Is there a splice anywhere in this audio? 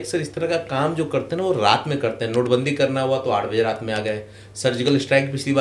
no; 0 cuts

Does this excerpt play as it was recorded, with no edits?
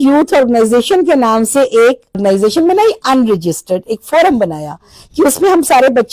no; 1 cut; at 2.2 s

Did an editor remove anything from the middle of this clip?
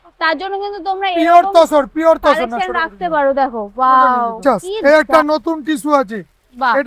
yes; 1 cut; at 4.4 s

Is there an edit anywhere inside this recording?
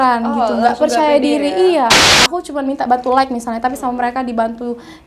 yes; 1 cut; at 2.1 s

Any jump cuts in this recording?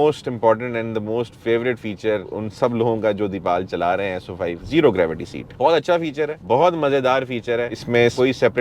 yes; 3 cuts; at 2.3 s, 4.6 s, 7.7 s

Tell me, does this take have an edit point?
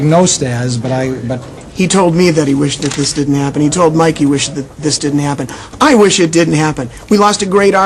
no; 0 cuts

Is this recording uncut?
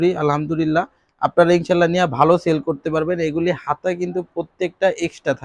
yes; 0 cuts

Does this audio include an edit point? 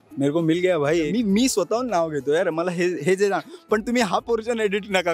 yes; 1 cut; at 1.1 s

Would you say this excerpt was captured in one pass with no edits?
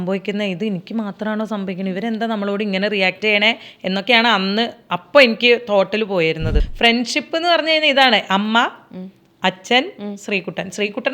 no; 1 cut; at 6.7 s

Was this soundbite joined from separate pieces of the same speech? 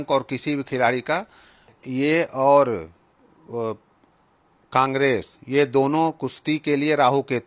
yes; 1 cut; at 1.8 s

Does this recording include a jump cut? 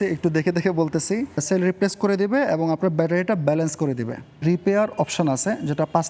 yes; 2 cuts; at 1.4 s, 4.4 s

